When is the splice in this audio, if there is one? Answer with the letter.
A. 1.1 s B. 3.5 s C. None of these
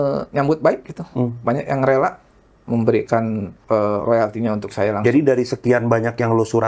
B